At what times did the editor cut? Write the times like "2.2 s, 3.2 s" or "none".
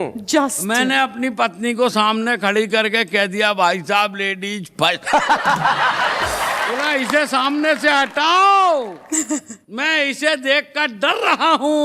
6.8 s

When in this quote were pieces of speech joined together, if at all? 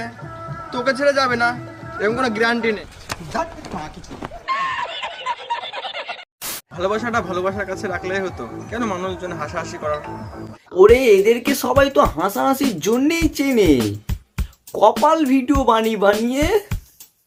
none

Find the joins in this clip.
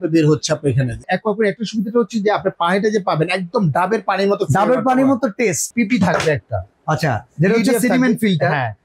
1.1 s, 5.7 s

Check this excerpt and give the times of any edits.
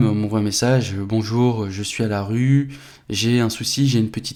none

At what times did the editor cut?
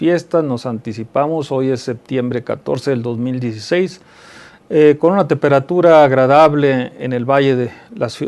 none

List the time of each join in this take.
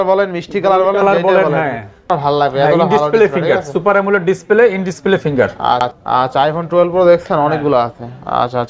2.1 s, 5.9 s

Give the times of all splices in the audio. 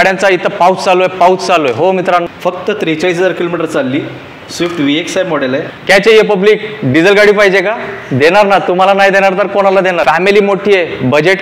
2.3 s, 5.8 s, 10.0 s

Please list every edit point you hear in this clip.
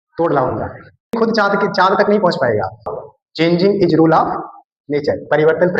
1.1 s, 2.9 s

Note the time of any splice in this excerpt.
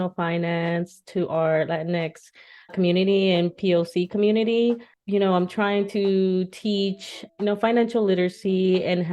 4.9 s

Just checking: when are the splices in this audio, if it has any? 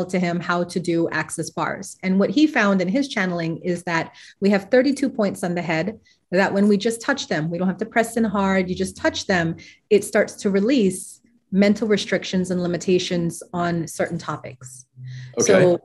none

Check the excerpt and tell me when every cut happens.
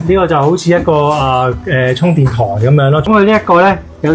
3.1 s

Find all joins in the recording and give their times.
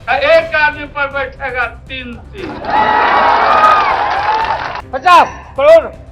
4.7 s

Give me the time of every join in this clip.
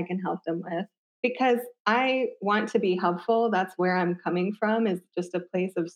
1.0 s

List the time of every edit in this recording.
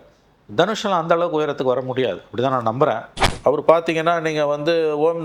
3.3 s

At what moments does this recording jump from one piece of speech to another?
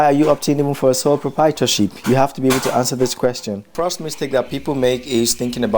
3.7 s

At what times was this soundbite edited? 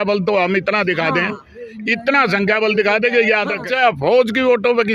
3.6 s

